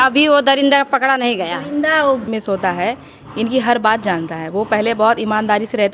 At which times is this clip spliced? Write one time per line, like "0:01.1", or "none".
0:02.3